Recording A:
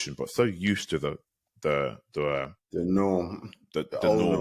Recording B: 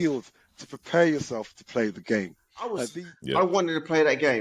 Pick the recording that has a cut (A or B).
B